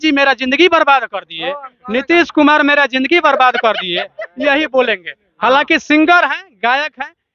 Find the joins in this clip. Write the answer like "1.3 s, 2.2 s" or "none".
none